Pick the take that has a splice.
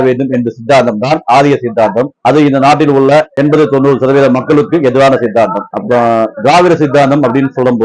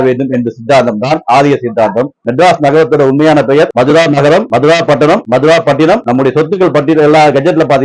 second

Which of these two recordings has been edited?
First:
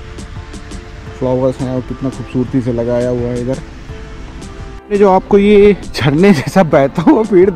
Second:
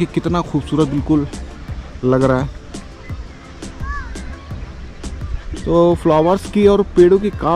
first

